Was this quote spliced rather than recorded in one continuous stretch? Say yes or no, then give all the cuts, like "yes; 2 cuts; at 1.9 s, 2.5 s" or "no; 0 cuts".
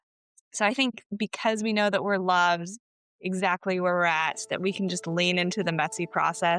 no; 0 cuts